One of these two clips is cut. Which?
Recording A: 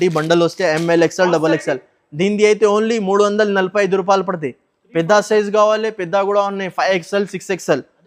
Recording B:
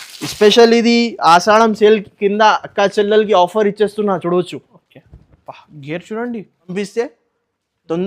B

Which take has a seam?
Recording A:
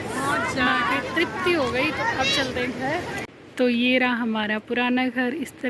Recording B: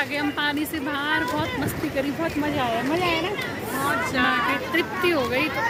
A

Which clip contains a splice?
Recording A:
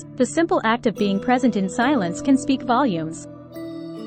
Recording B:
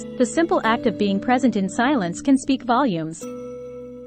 B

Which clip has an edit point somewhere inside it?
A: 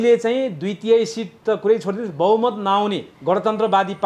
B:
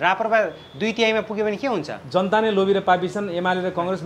A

